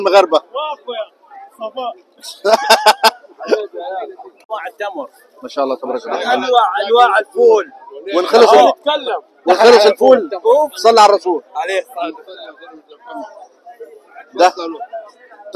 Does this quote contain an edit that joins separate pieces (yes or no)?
yes